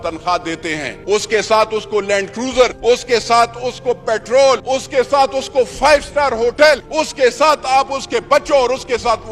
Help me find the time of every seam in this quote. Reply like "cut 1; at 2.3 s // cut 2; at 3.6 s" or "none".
cut 1; at 0.9 s // cut 2; at 2.8 s // cut 3; at 4.6 s // cut 4; at 6.9 s